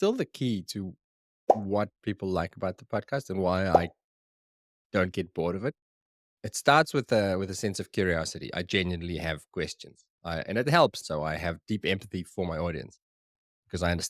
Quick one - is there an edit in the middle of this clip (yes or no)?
yes